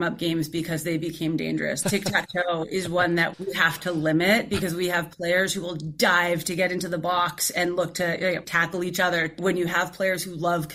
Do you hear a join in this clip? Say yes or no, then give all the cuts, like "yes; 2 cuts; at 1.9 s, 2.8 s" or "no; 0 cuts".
yes; 4 cuts; at 1.8 s, 3.3 s, 8.5 s, 9.4 s